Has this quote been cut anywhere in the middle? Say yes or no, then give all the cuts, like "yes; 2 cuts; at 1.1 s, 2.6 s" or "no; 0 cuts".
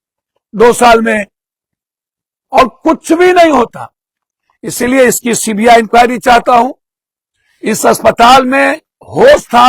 no; 0 cuts